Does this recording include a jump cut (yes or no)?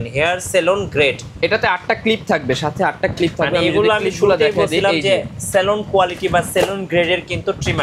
no